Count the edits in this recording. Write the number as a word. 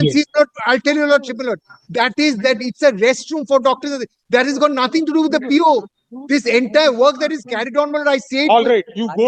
zero